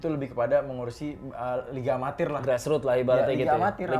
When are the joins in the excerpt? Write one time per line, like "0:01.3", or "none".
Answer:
none